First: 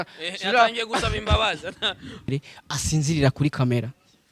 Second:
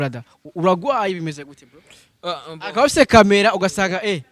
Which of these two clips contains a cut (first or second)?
first